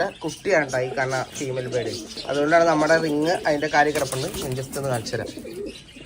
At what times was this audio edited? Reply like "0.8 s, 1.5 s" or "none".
2.2 s